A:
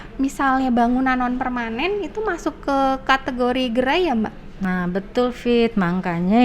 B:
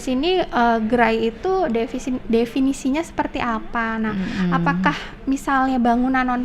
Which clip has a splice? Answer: A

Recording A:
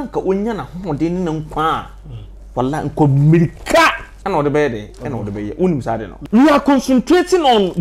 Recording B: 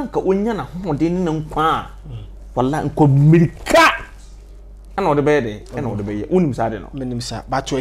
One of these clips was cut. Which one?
A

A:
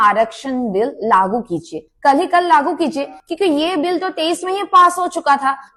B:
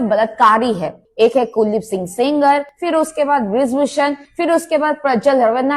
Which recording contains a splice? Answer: B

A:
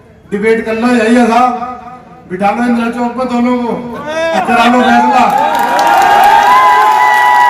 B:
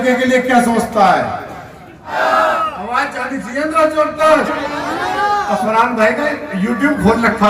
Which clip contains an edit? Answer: B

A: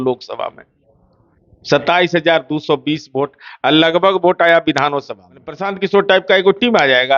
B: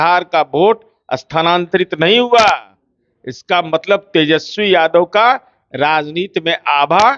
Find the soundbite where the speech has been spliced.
A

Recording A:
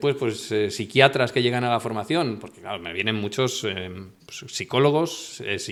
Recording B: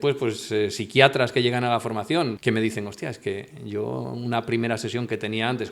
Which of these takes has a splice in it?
B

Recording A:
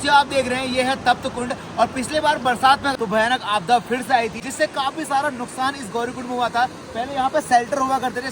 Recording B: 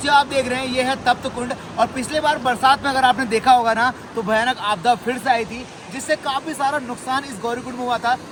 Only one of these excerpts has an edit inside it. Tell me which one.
A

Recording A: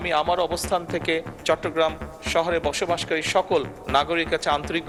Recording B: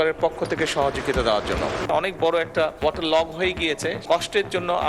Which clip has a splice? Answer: B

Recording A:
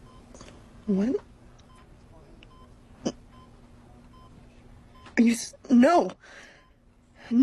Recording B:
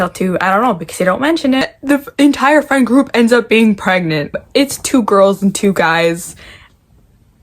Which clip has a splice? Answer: B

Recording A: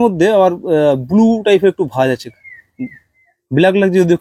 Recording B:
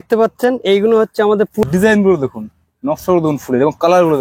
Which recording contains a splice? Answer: B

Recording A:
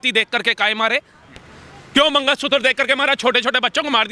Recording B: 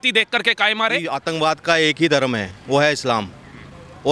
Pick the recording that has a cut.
B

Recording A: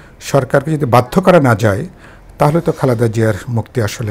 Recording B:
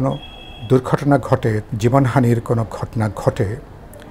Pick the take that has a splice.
B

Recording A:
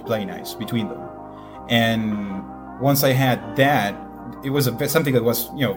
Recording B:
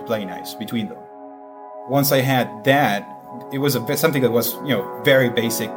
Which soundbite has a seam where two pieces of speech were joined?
B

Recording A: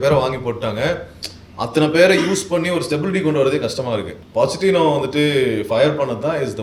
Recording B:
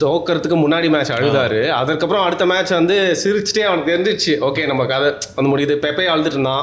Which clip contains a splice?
A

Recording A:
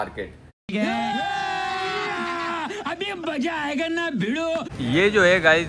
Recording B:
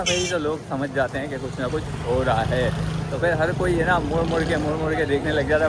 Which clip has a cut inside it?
A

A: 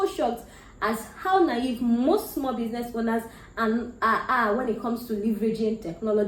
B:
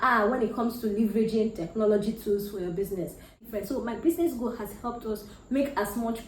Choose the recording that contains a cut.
B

